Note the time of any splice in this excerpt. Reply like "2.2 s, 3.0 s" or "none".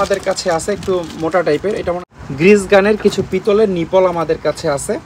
2.0 s